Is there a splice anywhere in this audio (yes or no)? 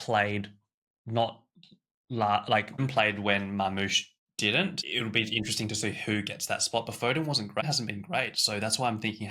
yes